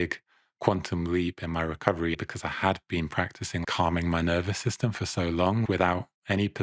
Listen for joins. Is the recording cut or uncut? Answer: cut